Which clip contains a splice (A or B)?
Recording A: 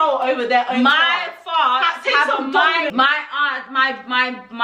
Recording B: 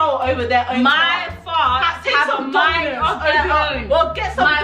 A